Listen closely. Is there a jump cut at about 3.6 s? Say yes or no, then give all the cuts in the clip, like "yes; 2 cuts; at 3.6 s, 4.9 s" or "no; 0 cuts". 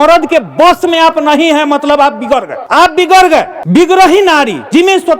yes; 2 cuts; at 2.6 s, 3.6 s